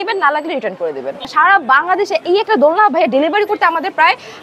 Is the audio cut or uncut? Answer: cut